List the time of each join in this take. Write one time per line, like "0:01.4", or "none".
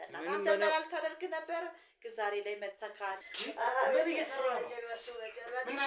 0:03.3